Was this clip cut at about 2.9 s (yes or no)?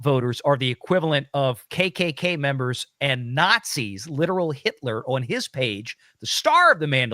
no